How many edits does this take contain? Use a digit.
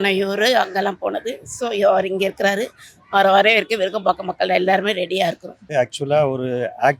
1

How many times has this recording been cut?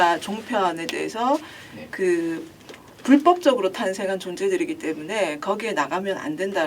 0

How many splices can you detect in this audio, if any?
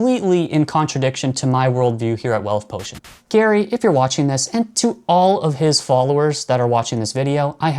1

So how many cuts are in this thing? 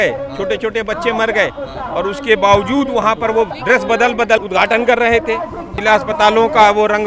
2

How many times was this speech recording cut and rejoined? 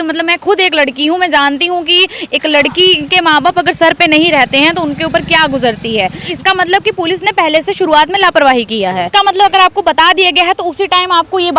2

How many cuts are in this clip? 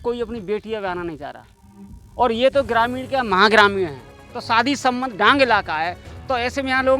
0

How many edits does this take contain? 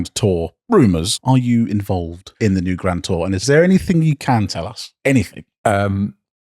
3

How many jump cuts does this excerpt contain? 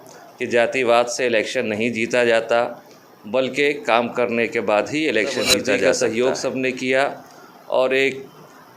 1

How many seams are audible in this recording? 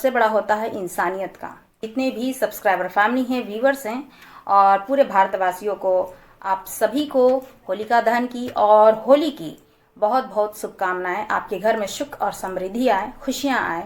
1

